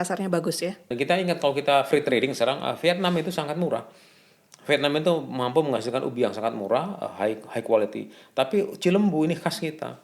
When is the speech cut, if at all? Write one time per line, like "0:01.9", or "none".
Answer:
0:00.9